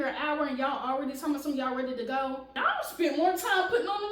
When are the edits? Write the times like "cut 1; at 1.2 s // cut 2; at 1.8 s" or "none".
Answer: cut 1; at 2.5 s